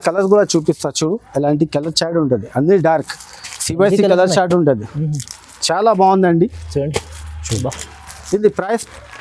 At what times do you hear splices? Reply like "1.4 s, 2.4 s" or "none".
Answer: none